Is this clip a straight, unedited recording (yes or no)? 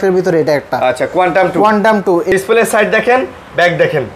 no